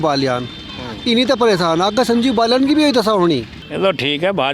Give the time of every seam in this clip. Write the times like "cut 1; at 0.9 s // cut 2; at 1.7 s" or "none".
cut 1; at 3.6 s